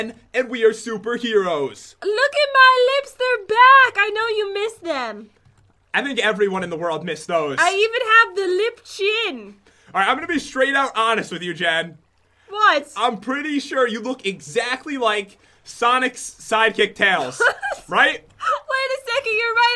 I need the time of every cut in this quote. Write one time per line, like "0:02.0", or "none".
0:17.6